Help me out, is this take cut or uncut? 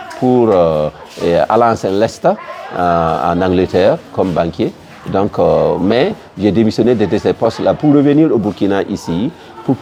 uncut